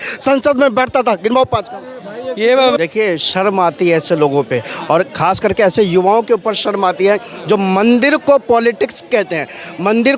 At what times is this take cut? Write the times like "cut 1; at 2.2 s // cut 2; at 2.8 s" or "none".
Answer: cut 1; at 2.8 s